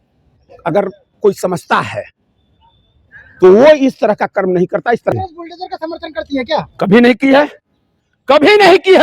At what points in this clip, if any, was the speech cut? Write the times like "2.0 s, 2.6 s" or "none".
5.1 s